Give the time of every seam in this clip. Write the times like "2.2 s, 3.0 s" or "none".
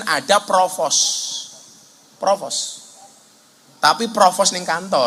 none